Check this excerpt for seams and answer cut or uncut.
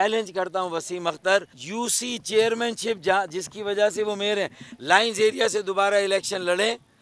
cut